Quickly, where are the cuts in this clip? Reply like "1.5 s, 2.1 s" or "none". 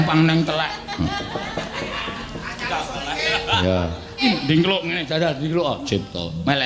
4.2 s